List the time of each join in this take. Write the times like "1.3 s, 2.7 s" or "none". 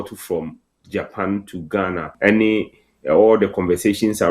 2.1 s